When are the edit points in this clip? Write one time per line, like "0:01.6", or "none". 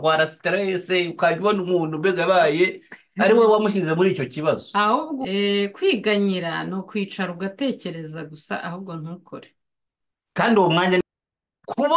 0:05.2
0:11.0